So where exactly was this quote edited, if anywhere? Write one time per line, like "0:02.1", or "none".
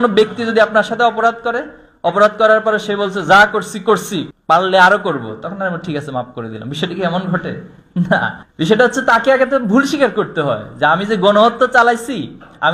none

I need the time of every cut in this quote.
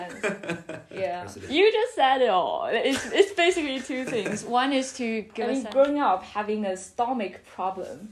0:01.3
0:05.4

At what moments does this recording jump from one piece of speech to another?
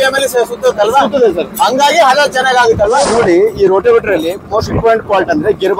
0:03.0

